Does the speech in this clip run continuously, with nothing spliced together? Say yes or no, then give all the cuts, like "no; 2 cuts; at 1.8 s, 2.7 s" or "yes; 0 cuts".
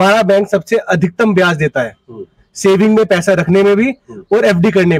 yes; 0 cuts